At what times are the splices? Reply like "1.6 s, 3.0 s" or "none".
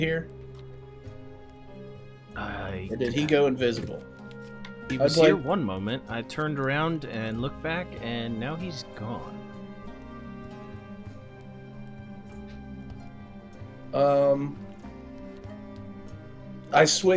none